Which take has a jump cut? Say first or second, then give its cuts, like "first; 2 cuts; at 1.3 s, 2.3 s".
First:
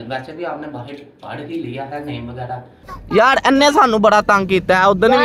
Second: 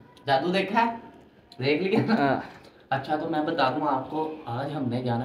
first; 1 cut; at 2.9 s